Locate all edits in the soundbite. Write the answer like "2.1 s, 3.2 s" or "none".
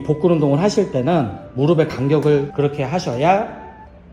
2.5 s